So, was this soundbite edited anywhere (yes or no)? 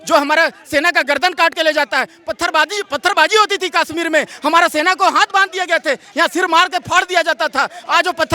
no